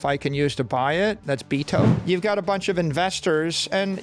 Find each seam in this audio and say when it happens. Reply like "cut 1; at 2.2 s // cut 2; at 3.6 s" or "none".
cut 1; at 2.0 s